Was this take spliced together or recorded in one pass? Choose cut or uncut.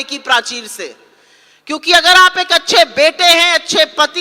uncut